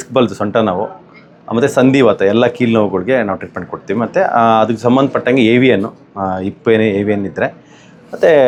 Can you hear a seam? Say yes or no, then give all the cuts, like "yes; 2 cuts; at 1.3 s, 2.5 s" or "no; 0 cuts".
no; 0 cuts